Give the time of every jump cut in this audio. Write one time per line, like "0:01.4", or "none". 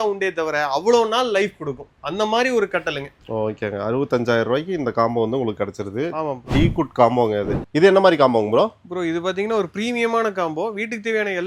none